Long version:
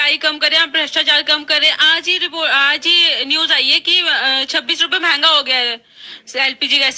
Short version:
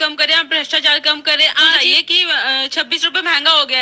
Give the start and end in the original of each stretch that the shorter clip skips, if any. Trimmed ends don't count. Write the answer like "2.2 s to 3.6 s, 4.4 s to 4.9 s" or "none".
2.0 s to 3.6 s